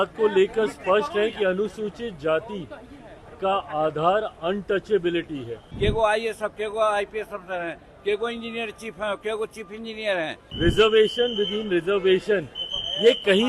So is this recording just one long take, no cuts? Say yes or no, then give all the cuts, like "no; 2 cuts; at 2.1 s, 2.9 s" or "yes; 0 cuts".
no; 2 cuts; at 5.6 s, 10.4 s